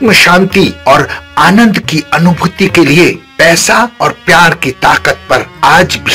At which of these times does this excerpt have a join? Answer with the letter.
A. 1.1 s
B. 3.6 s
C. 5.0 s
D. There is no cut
D